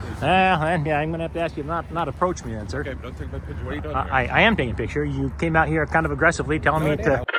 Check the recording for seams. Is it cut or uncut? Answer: uncut